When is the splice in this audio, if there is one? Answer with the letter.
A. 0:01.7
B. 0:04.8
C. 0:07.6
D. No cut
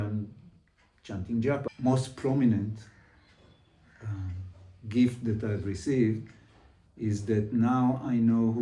A